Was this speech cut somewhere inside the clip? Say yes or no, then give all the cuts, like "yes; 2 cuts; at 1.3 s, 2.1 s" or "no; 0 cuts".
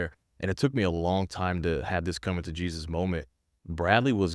yes; 1 cut; at 3.4 s